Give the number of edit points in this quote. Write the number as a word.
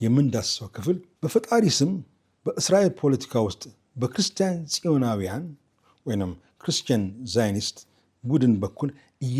one